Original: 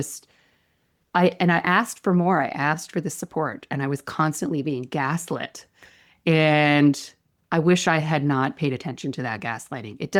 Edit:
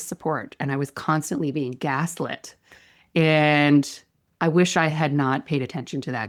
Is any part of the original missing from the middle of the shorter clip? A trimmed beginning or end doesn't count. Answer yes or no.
no